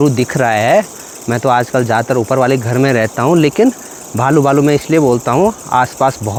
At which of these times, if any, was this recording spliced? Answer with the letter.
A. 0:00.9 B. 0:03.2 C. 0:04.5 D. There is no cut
D